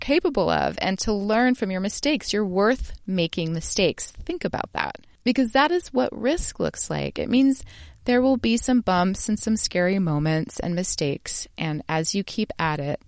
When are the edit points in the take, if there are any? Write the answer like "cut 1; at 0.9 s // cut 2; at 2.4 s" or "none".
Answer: cut 1; at 5.0 s

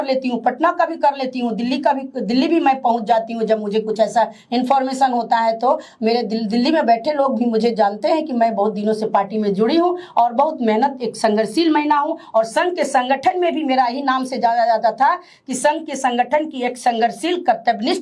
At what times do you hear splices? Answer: none

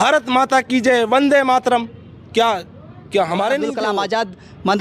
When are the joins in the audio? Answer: cut 1; at 3.9 s

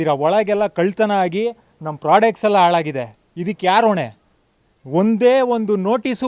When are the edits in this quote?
none

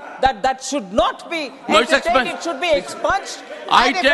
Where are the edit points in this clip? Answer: none

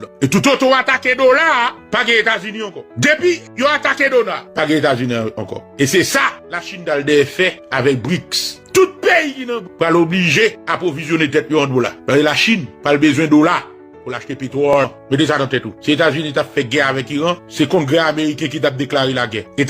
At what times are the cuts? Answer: cut 1; at 14.8 s

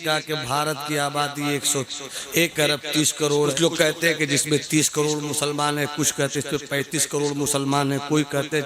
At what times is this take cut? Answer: cut 1; at 3.5 s

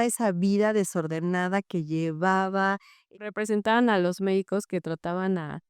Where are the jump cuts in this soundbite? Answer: cut 1; at 3.2 s

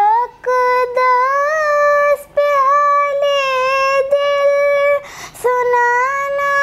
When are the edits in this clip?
none

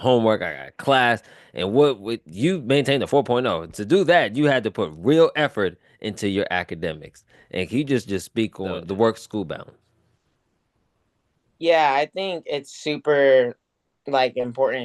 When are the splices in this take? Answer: cut 1; at 8.8 s

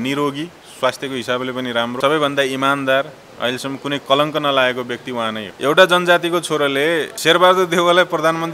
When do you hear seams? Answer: cut 1; at 2.0 s // cut 2; at 5.5 s // cut 3; at 7.1 s

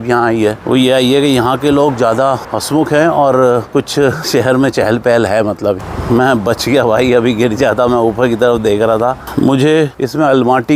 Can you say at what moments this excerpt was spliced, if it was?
cut 1; at 5.8 s // cut 2; at 9.2 s

